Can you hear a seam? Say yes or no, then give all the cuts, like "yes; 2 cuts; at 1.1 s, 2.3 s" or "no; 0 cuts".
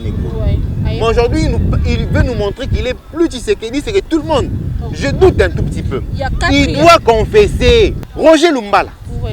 yes; 1 cut; at 8.0 s